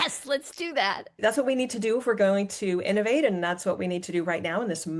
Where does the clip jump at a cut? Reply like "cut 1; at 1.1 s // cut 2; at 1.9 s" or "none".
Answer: cut 1; at 1.2 s